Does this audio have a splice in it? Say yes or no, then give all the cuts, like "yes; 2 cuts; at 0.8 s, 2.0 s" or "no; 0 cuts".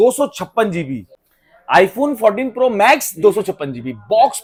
no; 0 cuts